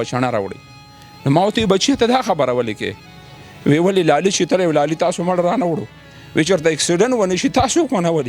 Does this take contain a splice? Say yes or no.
no